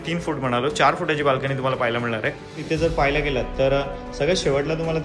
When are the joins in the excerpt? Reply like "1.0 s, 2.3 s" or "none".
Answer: 2.6 s